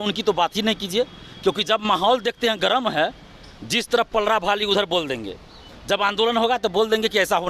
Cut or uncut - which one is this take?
uncut